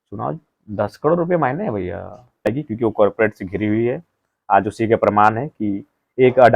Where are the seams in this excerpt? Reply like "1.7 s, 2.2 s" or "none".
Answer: 2.4 s

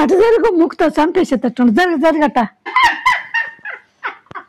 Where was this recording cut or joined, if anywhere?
2.7 s

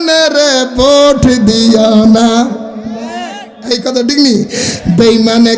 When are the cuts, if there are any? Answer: none

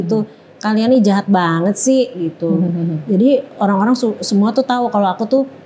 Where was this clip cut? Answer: none

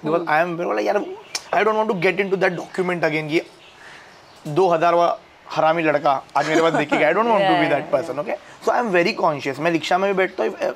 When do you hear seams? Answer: none

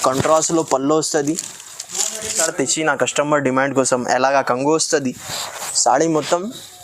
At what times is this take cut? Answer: 2.4 s

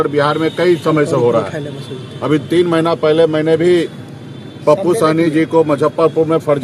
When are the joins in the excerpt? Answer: none

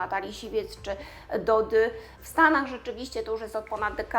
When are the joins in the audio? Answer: 2.1 s

